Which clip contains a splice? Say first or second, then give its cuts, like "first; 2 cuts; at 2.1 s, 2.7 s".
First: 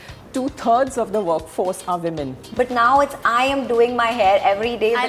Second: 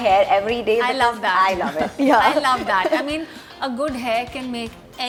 first; 1 cut; at 2.4 s